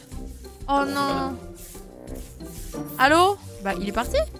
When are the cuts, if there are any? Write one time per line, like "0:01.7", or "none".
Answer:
0:03.5